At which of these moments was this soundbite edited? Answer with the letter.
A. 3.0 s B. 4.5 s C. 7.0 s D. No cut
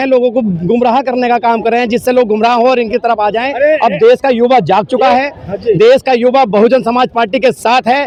D